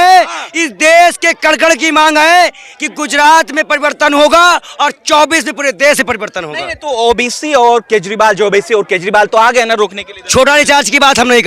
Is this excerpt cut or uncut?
uncut